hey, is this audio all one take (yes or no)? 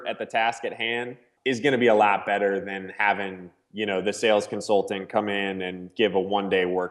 no